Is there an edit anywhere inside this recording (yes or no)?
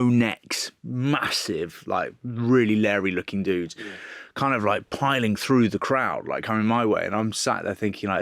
no